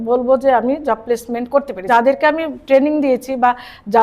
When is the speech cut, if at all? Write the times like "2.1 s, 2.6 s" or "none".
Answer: 1.9 s

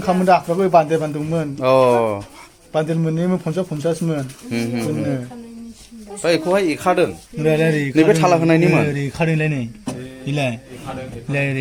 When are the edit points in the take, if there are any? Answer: none

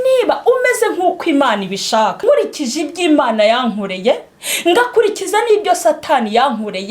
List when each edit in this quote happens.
2.2 s

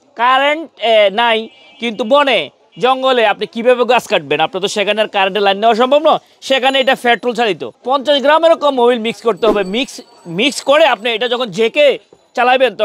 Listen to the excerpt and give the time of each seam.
7.7 s

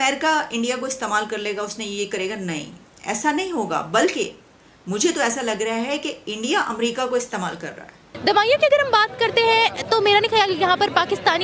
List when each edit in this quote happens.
8.1 s

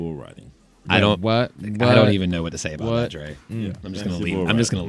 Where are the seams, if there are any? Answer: 3.8 s

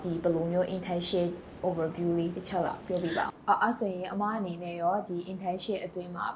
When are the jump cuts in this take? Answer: 3.3 s

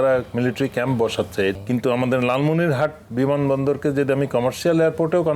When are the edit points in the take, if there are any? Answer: 1.5 s

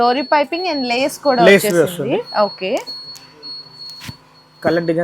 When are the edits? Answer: none

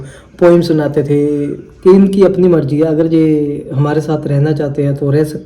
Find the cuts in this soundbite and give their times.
1.7 s

